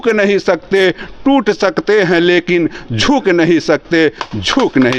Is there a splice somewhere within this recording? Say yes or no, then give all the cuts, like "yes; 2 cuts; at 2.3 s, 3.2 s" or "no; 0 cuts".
no; 0 cuts